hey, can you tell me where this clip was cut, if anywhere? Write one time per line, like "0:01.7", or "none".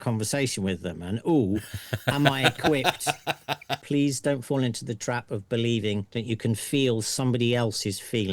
0:03.7
0:06.1